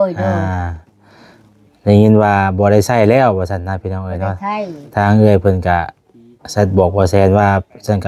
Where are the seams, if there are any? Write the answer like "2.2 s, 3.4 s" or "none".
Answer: none